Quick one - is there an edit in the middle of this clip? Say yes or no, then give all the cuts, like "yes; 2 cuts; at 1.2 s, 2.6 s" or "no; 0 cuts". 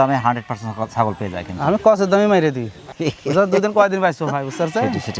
yes; 1 cut; at 2.8 s